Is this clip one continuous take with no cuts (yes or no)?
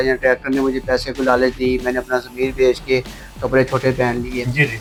yes